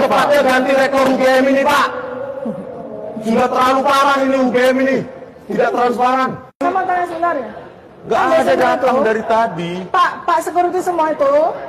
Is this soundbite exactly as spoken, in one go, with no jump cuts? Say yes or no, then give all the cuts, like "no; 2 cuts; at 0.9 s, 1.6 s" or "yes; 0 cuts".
no; 1 cut; at 6.6 s